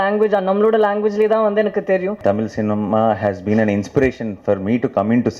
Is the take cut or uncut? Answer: cut